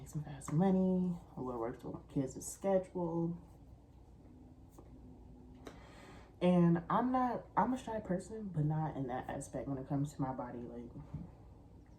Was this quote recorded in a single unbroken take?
yes; 0 cuts

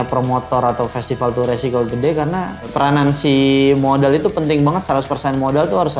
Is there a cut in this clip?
no; 0 cuts

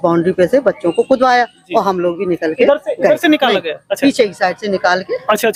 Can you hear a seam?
no; 0 cuts

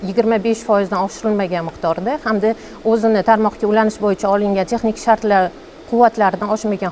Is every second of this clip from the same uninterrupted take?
yes; 0 cuts

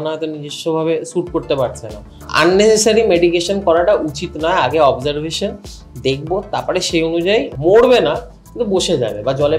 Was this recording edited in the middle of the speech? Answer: yes; 2 cuts; at 2.2 s, 7.5 s

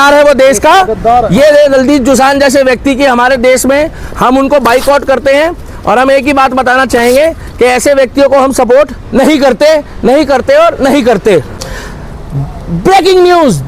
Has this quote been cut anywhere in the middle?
yes; 1 cut; at 11.5 s

